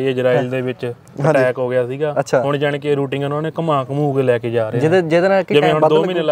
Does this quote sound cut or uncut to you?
uncut